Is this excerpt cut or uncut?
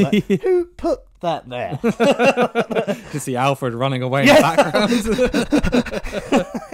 uncut